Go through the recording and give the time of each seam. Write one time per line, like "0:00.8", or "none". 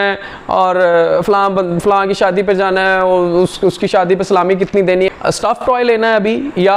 0:05.1